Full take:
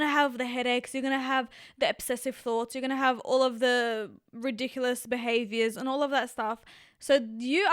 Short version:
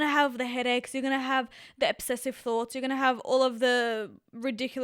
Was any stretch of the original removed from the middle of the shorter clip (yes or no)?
no